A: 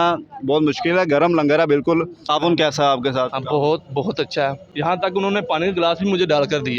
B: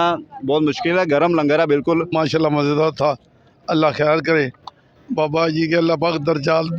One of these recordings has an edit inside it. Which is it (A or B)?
A